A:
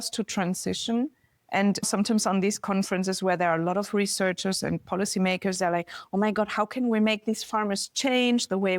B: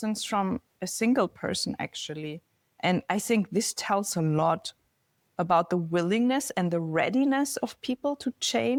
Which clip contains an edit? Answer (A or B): A